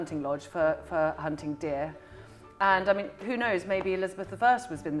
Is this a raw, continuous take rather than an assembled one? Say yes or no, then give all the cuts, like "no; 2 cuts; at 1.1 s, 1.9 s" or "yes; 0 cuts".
yes; 0 cuts